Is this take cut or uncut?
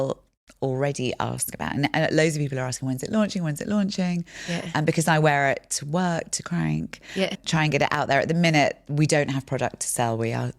uncut